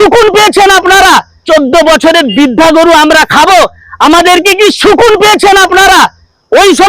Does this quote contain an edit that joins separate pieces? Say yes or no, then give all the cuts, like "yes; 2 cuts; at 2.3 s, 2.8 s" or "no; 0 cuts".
yes; 1 cut; at 1.3 s